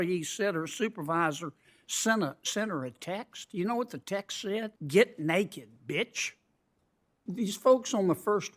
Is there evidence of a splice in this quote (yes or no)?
yes